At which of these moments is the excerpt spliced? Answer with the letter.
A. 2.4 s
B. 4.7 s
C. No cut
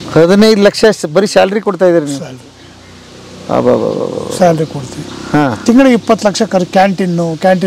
C